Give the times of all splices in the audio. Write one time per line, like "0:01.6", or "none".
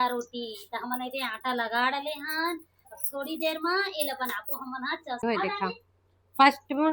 0:05.2